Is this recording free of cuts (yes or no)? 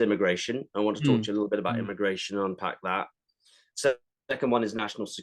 yes